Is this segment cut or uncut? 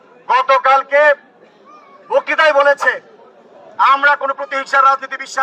uncut